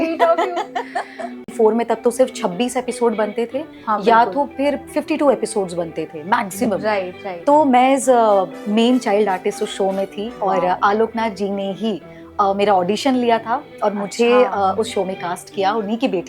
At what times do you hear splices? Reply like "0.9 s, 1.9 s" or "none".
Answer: 1.5 s